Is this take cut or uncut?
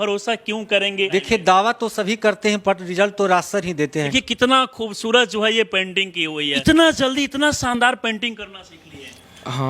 cut